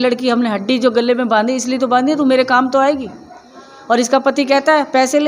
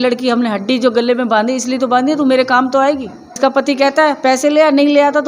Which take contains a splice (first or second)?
second